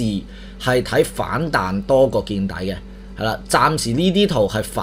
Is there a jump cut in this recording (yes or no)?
no